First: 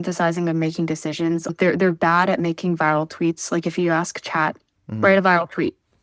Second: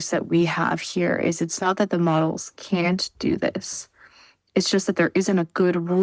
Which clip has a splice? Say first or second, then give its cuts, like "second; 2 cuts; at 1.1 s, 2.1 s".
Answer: first; 1 cut; at 1.5 s